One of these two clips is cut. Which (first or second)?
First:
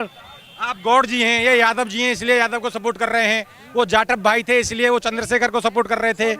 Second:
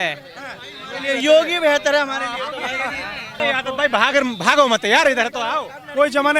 second